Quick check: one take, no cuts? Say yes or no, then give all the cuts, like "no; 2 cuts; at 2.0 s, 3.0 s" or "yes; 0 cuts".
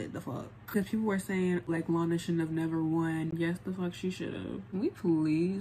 no; 4 cuts; at 0.7 s, 1.7 s, 3.3 s, 4.7 s